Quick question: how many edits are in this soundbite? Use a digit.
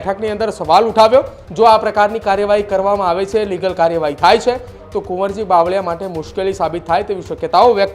1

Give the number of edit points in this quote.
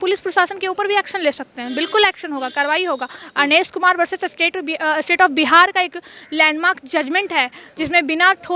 0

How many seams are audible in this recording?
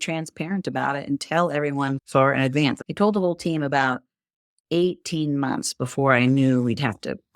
1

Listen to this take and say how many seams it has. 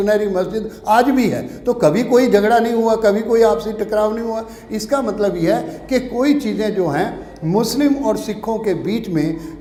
0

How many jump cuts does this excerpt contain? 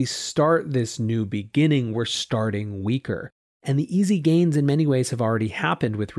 1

